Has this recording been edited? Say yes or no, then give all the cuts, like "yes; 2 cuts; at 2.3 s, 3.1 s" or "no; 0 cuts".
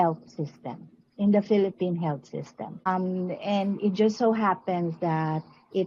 yes; 1 cut; at 2.9 s